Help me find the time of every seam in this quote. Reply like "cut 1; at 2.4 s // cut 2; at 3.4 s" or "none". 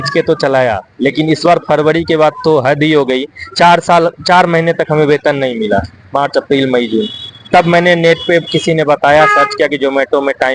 none